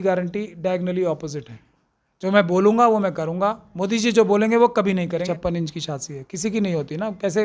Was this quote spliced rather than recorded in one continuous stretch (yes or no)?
yes